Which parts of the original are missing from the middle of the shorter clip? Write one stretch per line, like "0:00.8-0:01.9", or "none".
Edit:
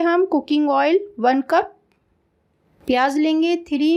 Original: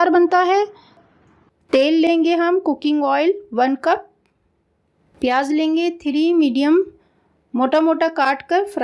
none